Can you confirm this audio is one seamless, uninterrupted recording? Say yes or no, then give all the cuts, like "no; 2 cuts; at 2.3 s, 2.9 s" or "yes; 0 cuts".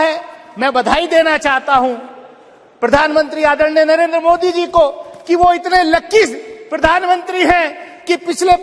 yes; 0 cuts